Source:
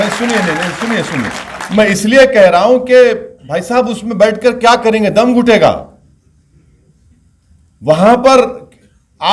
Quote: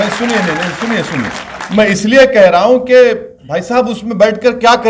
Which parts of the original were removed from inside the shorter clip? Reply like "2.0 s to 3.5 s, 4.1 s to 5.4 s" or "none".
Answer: none